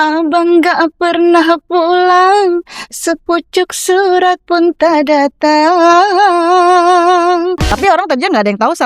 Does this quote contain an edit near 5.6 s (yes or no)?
no